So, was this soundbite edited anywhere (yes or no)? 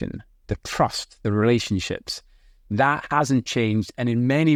no